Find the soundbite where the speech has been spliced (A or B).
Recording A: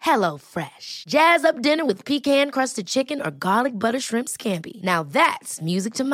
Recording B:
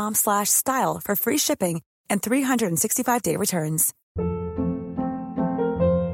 B